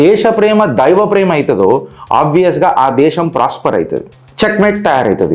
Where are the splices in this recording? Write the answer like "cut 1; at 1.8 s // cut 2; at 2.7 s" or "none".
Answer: cut 1; at 4.2 s